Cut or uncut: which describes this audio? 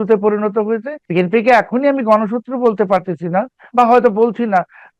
cut